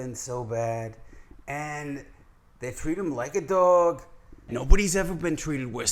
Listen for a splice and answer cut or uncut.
cut